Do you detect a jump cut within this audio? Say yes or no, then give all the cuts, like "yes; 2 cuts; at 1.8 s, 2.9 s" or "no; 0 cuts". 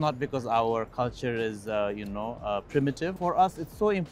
yes; 1 cut; at 3.1 s